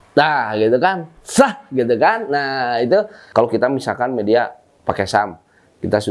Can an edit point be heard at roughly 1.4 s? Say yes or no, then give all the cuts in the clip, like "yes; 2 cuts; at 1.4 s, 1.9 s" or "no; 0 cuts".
no; 1 cut; at 3.2 s